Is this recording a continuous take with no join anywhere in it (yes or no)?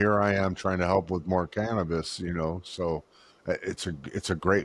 yes